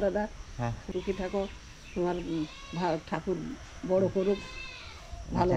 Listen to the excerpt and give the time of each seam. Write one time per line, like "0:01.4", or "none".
0:00.9